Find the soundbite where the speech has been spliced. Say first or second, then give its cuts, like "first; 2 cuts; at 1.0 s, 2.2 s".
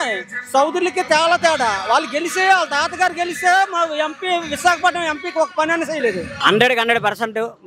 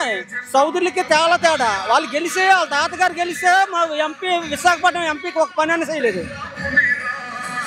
first; 1 cut; at 6.4 s